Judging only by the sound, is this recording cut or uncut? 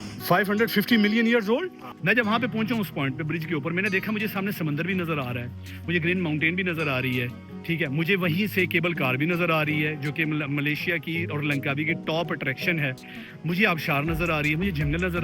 cut